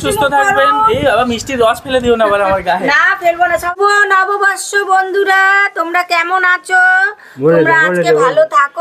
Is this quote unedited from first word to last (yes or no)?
no